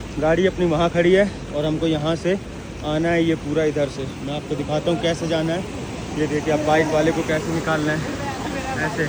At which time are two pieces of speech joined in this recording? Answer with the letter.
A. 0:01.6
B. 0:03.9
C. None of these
C